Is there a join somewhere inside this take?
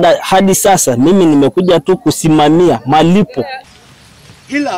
yes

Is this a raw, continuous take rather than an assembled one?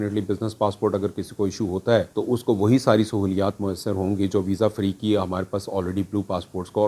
no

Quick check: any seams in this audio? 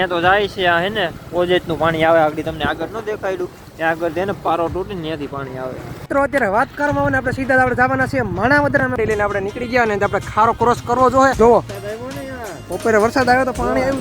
yes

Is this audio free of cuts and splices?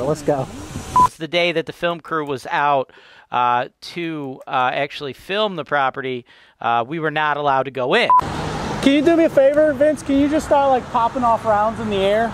no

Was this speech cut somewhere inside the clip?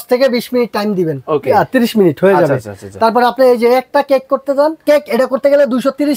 yes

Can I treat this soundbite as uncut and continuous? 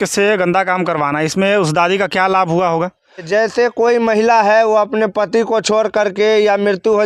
no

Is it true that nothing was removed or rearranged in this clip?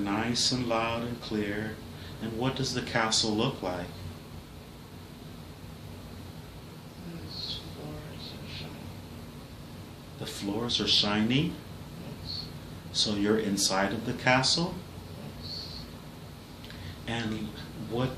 yes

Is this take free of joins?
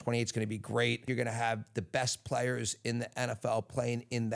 no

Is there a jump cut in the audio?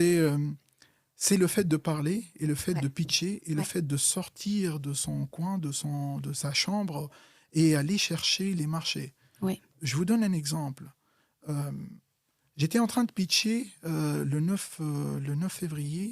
no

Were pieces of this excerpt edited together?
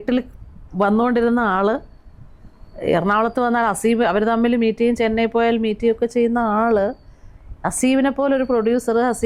no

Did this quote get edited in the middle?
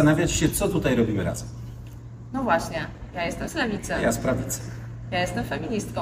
no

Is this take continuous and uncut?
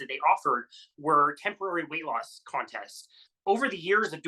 no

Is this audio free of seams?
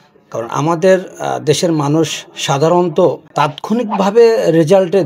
no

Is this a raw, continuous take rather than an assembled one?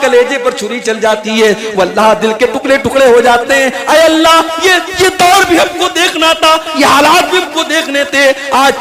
yes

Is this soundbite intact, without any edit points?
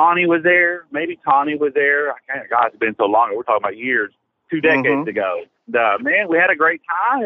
no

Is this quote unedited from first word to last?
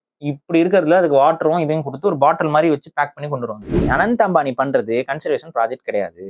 no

